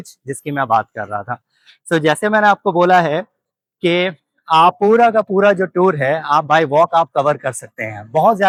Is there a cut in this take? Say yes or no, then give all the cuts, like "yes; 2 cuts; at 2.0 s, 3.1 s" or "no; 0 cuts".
no; 0 cuts